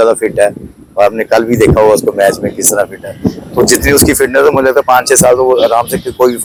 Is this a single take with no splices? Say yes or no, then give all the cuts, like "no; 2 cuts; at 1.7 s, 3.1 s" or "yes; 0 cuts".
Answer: yes; 0 cuts